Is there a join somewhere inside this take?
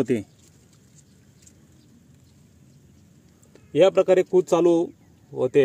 no; 0 cuts

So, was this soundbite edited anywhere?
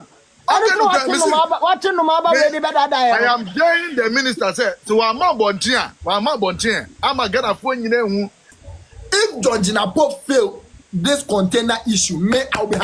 yes; 1 cut; at 8.5 s

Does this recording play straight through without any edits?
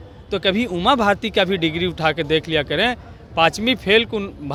yes; 0 cuts

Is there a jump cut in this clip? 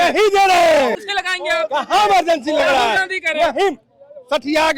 yes; 1 cut; at 1.1 s

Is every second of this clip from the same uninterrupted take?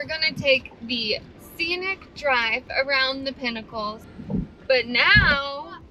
no; 1 cut; at 4.0 s

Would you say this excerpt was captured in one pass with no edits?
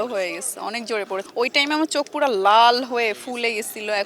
no; 1 cut; at 1.3 s

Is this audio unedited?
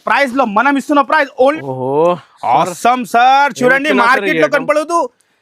no; 1 cut; at 1.6 s

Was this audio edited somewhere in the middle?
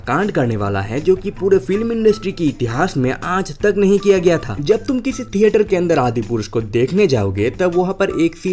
no; 0 cuts

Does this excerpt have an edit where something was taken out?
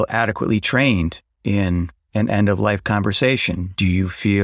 no; 0 cuts

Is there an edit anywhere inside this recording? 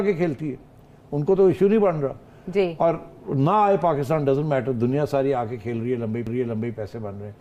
no; 0 cuts

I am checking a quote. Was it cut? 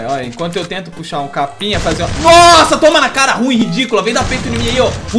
no; 0 cuts

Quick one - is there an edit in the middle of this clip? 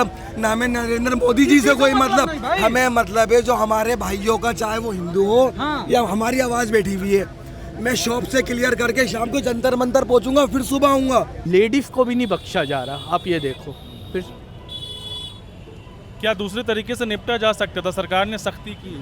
yes; 1 cut; at 11.4 s

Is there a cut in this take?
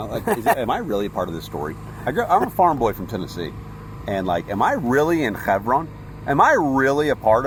no; 0 cuts

